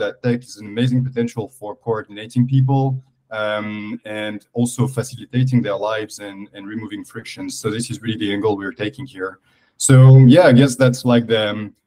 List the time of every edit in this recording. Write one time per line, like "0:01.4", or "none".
none

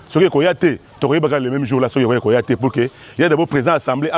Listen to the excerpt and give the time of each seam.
none

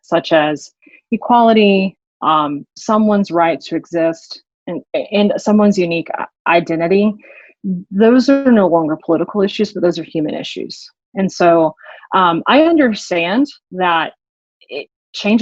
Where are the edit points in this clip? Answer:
none

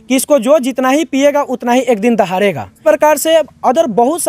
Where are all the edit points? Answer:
0:02.7

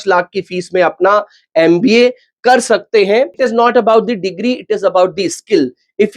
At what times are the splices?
0:03.4

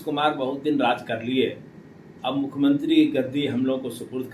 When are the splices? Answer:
none

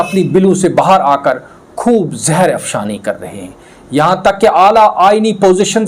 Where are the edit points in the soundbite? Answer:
none

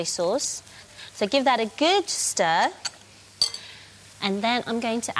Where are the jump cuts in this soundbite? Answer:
0:02.6

